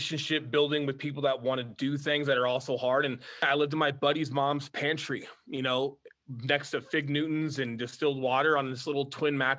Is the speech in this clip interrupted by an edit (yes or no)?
yes